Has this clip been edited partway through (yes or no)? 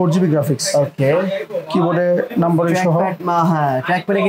no